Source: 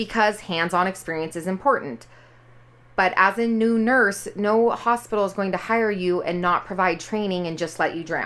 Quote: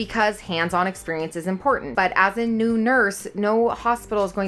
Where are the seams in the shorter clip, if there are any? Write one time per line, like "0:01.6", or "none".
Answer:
0:01.9